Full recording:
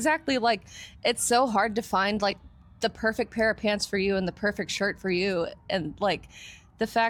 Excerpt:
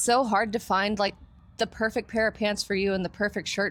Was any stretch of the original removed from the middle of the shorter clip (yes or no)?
no